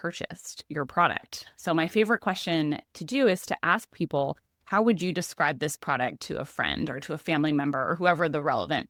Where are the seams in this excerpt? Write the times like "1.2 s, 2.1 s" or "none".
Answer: none